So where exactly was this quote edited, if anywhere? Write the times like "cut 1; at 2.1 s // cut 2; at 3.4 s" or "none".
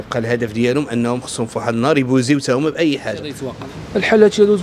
cut 1; at 3.6 s